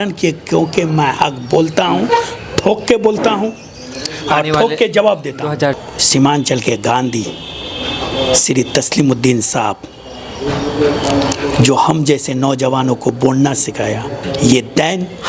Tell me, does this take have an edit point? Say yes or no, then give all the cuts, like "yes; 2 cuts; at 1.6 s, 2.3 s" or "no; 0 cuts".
yes; 2 cuts; at 5.8 s, 14.1 s